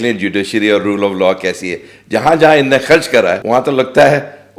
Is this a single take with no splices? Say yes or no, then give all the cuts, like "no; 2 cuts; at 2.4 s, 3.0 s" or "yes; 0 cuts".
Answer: no; 1 cut; at 3.4 s